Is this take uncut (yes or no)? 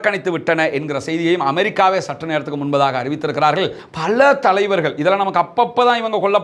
no